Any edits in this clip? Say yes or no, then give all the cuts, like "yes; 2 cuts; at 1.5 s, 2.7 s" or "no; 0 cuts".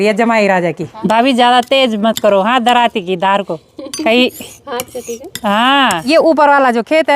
yes; 2 cuts; at 1.0 s, 6.0 s